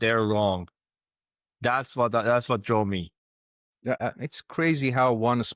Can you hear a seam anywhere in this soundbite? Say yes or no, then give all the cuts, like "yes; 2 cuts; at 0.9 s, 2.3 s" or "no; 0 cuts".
yes; 1 cut; at 3.7 s